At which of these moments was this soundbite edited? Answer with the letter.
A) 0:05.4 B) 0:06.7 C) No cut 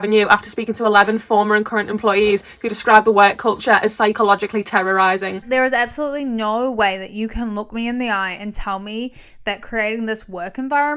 A